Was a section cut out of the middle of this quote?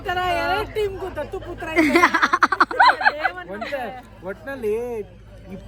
no; 0 cuts

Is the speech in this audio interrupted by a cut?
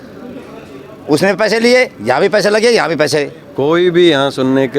yes; 1 cut; at 3.4 s

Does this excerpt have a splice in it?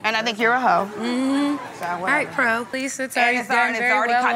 no; 0 cuts

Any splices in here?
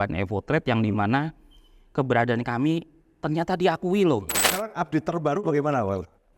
yes; 1 cut; at 4.4 s

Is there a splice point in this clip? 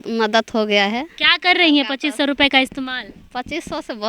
no; 0 cuts

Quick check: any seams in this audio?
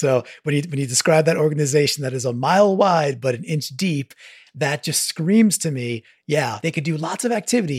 yes; 1 cut; at 6.5 s

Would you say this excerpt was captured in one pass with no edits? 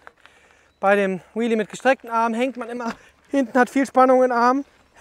yes; 0 cuts

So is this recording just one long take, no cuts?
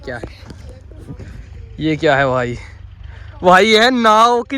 yes; 0 cuts

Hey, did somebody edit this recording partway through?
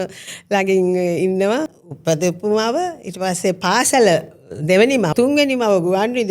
yes; 2 cuts; at 1.7 s, 5.1 s

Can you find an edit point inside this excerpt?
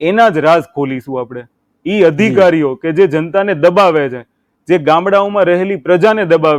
no; 0 cuts

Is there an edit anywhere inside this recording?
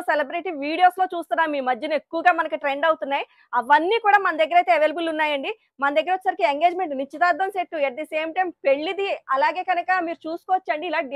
no; 0 cuts

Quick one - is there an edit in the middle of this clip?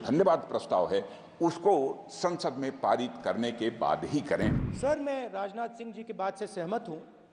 yes; 1 cut; at 4.6 s

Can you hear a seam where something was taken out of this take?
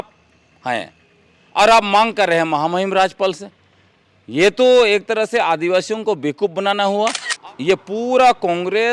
yes; 1 cut; at 7.3 s

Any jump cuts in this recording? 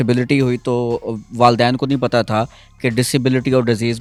no; 0 cuts

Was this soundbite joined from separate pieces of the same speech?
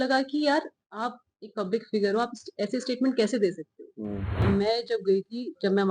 yes; 1 cut; at 4.4 s

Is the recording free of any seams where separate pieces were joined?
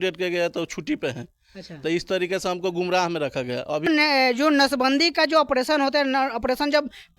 no; 1 cut; at 3.9 s

